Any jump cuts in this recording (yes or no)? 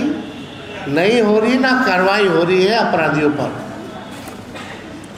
no